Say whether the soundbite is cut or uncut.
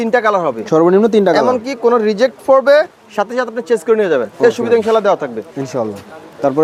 uncut